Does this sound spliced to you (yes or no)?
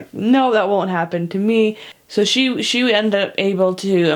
yes